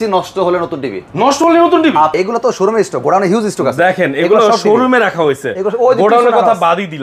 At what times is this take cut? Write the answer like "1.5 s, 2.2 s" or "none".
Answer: 2.1 s